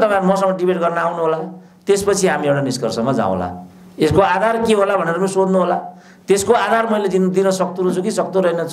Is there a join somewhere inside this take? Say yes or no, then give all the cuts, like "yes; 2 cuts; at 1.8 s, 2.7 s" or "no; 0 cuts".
no; 0 cuts